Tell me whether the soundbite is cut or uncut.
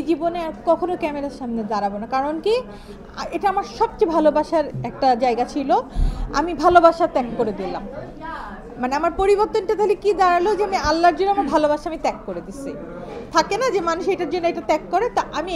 uncut